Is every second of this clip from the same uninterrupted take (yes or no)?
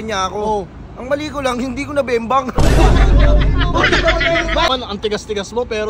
no